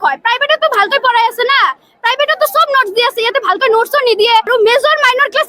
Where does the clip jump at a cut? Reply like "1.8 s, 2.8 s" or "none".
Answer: 4.5 s